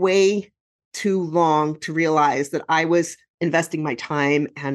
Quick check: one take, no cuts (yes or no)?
yes